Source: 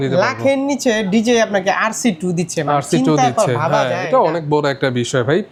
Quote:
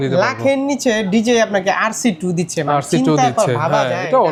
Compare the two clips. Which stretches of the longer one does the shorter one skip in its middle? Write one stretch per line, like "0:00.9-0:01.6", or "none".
none